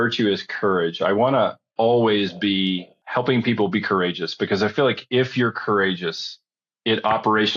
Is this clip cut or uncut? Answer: cut